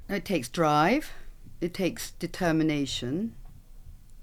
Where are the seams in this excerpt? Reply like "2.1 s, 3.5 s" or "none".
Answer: none